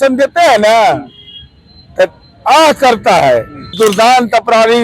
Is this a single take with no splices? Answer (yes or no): no